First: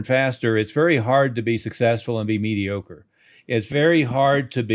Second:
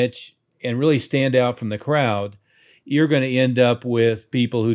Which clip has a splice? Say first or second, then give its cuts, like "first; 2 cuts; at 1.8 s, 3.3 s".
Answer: first; 1 cut; at 3.7 s